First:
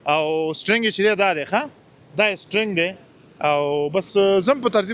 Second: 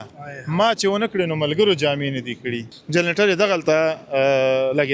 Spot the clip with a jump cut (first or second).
second